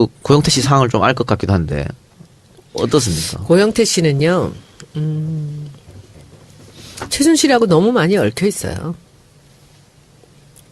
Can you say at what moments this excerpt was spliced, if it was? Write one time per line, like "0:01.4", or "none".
0:08.3